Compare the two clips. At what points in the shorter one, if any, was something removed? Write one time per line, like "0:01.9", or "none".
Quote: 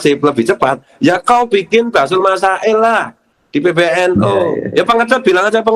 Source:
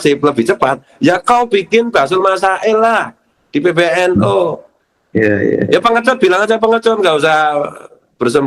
0:04.6